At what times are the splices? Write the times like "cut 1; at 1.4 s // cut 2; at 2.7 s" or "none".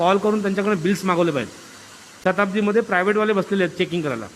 cut 1; at 2.0 s